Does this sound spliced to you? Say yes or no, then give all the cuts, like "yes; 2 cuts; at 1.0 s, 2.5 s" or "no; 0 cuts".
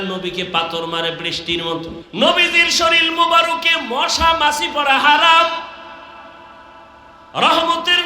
yes; 1 cut; at 2.0 s